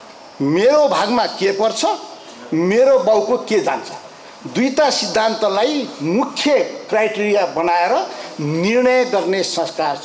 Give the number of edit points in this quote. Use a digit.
0